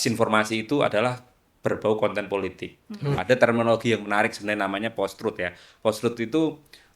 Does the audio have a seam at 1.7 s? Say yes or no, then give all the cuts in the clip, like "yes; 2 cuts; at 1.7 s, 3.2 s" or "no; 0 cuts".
no; 1 cut; at 3.2 s